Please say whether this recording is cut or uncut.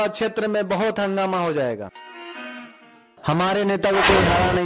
uncut